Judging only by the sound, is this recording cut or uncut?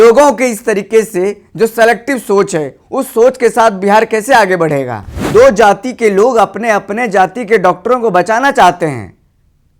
cut